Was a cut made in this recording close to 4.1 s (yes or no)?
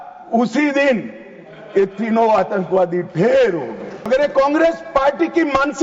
yes